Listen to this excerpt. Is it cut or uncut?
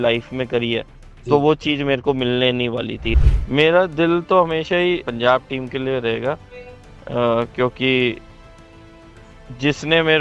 cut